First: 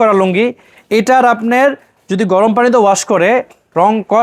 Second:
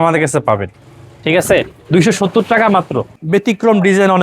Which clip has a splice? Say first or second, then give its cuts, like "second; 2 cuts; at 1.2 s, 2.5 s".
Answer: second; 1 cut; at 3.1 s